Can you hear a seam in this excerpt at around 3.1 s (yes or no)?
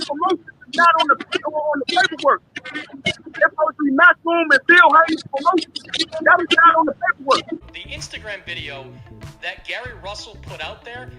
no